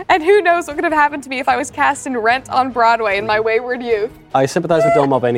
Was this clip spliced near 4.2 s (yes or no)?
yes